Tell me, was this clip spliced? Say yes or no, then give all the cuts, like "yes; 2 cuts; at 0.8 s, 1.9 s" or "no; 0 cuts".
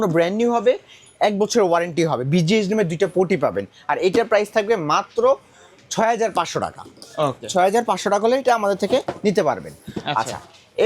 no; 0 cuts